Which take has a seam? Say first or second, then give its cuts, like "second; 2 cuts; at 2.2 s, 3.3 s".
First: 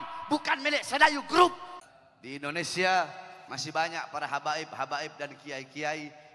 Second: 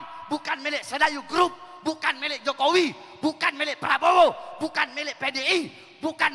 first; 1 cut; at 1.7 s